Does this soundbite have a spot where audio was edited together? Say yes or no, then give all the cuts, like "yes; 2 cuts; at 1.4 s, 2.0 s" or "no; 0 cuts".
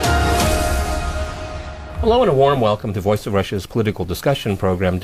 yes; 1 cut; at 0.9 s